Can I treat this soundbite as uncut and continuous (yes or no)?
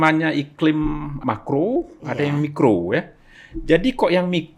no